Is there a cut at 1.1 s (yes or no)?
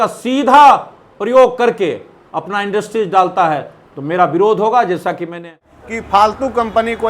no